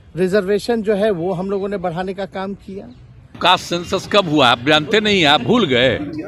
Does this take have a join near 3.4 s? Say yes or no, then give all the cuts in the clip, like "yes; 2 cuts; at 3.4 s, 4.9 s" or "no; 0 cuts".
yes; 1 cut; at 3.4 s